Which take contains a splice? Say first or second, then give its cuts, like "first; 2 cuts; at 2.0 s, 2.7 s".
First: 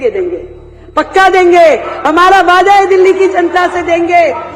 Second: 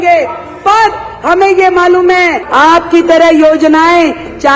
second; 1 cut; at 2.4 s